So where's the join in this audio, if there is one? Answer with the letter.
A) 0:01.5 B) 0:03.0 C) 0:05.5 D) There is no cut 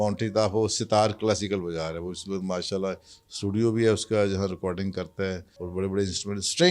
C